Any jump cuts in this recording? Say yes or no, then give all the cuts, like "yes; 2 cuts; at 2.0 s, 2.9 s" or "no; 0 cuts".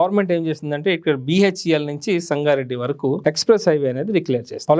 no; 0 cuts